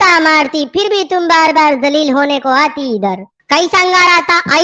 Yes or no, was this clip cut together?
yes